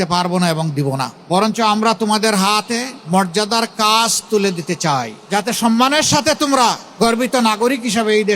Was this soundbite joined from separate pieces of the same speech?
yes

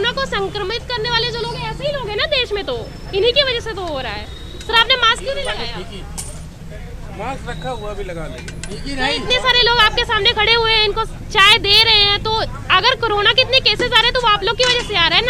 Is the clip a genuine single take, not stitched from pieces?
yes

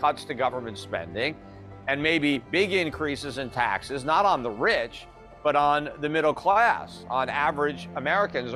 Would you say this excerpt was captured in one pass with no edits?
yes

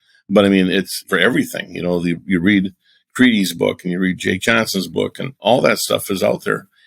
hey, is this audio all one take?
no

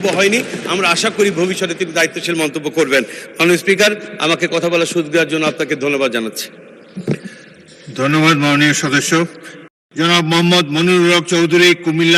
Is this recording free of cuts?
yes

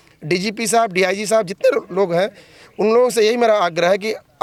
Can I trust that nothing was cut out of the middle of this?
yes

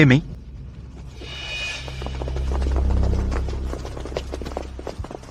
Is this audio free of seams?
yes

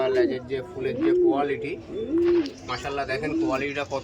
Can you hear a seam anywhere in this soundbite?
no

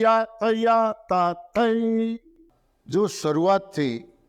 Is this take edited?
yes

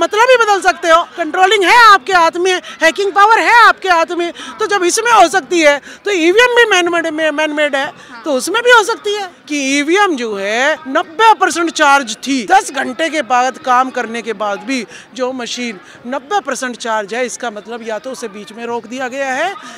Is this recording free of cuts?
no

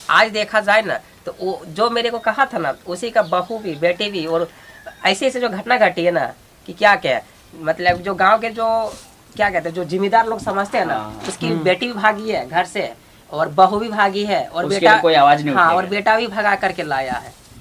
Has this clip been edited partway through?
no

